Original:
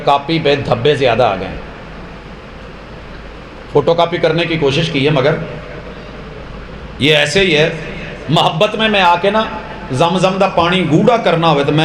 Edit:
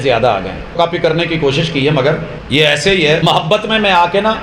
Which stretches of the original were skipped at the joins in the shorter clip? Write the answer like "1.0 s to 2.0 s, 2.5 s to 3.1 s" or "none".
1.7 s to 4.0 s, 5.5 s to 6.8 s, 7.7 s to 8.3 s